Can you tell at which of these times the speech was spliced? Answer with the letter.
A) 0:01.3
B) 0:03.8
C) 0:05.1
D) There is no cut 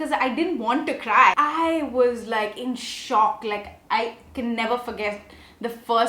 A